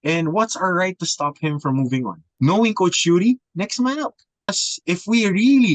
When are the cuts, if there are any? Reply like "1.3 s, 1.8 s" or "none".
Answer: 2.2 s, 4.7 s